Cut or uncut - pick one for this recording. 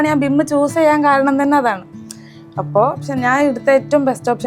uncut